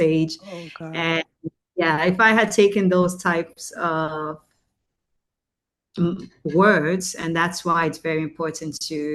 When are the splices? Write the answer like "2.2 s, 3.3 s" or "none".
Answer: none

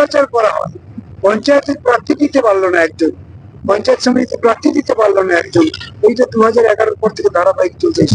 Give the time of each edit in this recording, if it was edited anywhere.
none

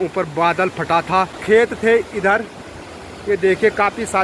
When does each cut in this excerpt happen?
1.4 s

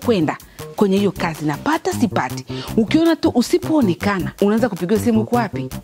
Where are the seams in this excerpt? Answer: 4.3 s

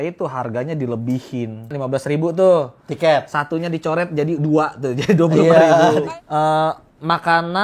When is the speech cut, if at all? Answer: 1.7 s, 6.0 s

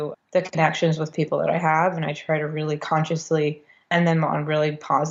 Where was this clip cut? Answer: none

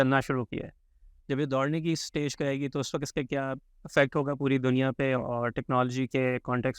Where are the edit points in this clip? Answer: 3.7 s

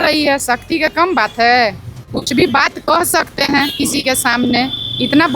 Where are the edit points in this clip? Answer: none

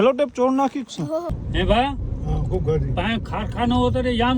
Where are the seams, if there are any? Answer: 1.3 s

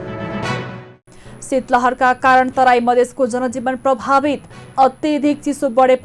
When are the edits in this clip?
0.9 s

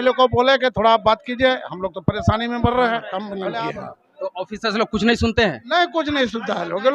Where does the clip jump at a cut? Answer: 3.6 s

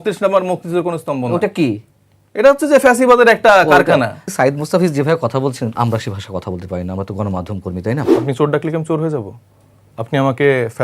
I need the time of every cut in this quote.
4.2 s, 5.7 s, 8.1 s

